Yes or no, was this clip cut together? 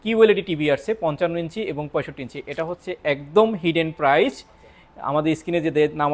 no